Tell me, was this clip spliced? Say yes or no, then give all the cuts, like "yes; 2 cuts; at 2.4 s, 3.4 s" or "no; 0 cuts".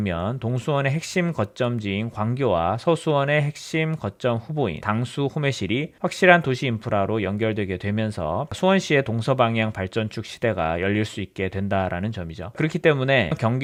no; 0 cuts